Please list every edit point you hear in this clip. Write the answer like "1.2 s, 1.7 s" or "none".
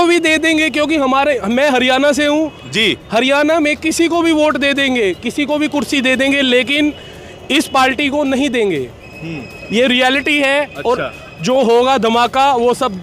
none